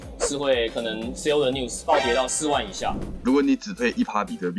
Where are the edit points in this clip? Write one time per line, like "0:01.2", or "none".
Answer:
0:03.0